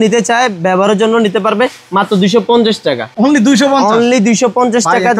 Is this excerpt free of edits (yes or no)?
yes